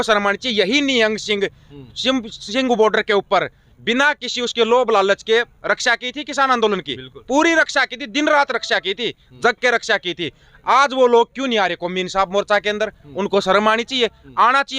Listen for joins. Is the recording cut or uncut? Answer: uncut